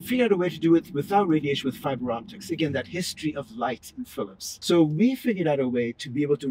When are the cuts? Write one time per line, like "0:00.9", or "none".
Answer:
0:04.5